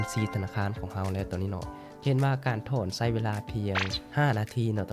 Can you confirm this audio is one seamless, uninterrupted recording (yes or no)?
no